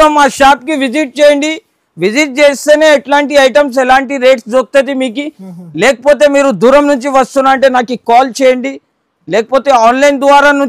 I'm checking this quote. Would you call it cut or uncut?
uncut